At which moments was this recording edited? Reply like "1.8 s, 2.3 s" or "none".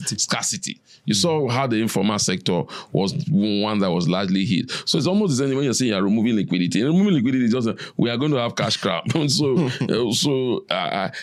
none